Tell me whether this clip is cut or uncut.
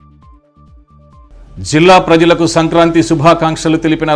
cut